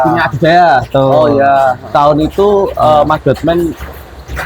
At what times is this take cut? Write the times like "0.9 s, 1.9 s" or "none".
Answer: 1.9 s